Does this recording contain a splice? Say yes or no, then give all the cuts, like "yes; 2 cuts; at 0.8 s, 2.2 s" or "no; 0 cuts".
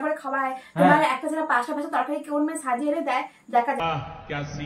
no; 0 cuts